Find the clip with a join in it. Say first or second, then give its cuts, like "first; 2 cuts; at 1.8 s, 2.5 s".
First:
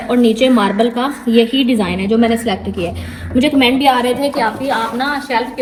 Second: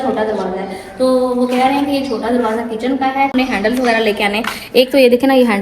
second; 1 cut; at 3.3 s